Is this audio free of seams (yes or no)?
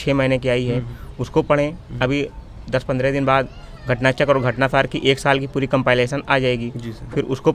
yes